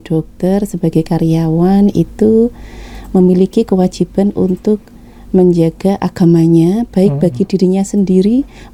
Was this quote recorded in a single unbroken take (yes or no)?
yes